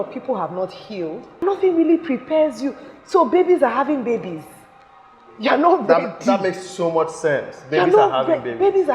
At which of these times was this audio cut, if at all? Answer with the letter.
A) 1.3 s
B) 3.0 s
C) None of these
A